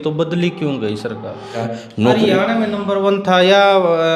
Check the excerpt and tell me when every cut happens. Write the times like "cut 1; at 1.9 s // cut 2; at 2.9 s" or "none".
cut 1; at 1.7 s

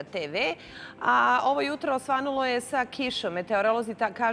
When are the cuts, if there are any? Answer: none

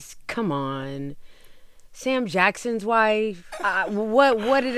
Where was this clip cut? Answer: cut 1; at 3.5 s

